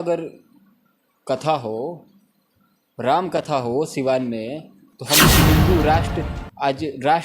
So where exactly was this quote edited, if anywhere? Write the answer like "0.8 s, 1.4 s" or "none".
5.4 s